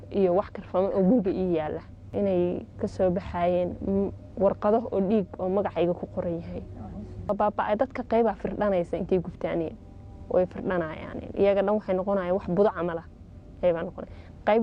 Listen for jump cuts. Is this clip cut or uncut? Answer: cut